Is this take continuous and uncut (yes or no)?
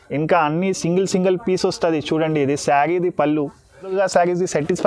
no